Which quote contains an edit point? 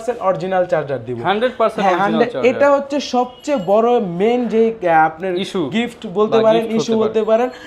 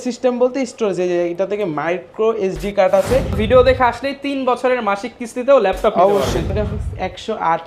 second; 2 cuts; at 3.4 s, 6.5 s

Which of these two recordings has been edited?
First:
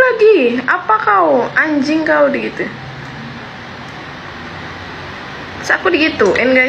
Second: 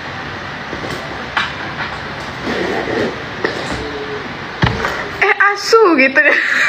first; 1 cut; at 3.6 s

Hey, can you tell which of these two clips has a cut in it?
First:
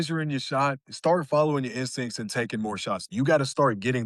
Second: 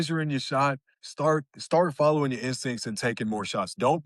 first; 2 cuts; at 0.9 s, 3.1 s

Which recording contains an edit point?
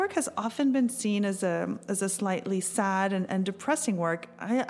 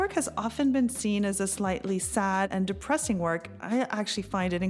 second; 2 cuts; at 1.3 s, 2.5 s

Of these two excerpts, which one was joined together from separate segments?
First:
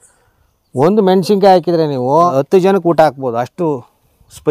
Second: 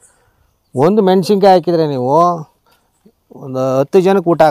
first; 1 cut; at 2.3 s

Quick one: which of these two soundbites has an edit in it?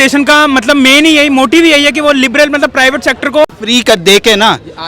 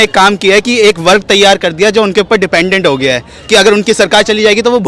first; 1 cut; at 3.5 s

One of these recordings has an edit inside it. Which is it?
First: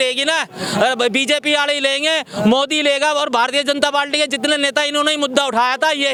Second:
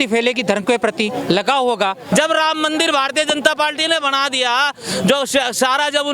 second; 1 cut; at 2.0 s

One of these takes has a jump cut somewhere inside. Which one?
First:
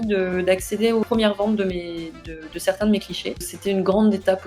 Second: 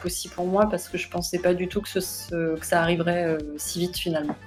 first; 2 cuts; at 1.0 s, 3.5 s

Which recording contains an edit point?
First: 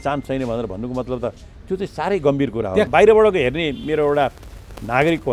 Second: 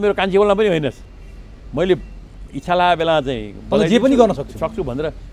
first; 1 cut; at 2.9 s

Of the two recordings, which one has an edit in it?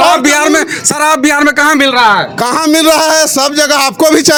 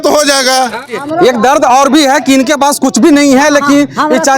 second; 1 cut; at 0.9 s

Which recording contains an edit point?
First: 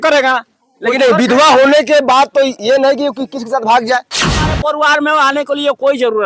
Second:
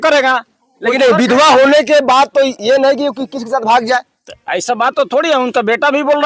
first; 1 cut; at 4.4 s

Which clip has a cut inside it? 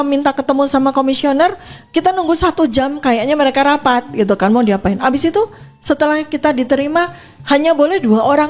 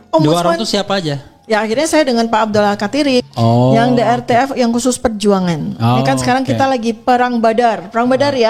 second; 1 cut; at 3.2 s

